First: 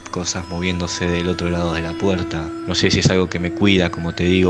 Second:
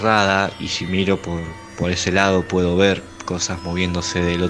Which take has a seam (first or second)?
first